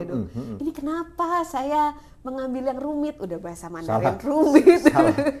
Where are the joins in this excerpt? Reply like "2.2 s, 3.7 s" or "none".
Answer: none